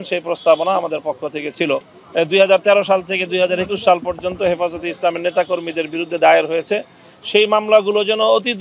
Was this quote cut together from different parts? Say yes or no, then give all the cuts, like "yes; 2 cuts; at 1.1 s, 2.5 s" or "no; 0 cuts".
yes; 1 cut; at 2.0 s